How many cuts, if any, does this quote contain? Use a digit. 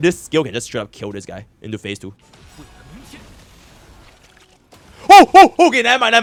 0